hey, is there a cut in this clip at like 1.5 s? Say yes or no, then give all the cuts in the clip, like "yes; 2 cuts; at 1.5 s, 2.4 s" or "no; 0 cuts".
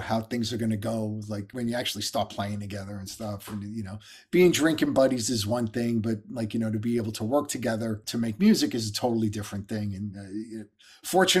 yes; 2 cuts; at 1.5 s, 8.0 s